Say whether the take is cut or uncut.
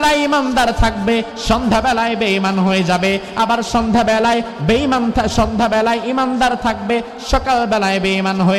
uncut